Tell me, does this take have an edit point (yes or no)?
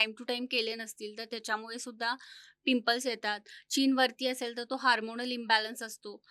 no